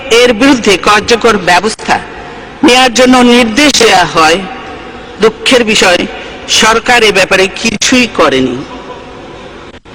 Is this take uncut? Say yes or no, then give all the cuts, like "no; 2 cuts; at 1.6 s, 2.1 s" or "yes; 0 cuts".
yes; 0 cuts